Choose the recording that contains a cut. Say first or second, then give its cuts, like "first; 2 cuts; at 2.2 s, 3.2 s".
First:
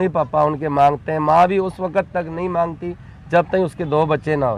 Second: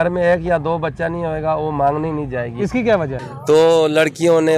second; 1 cut; at 3.2 s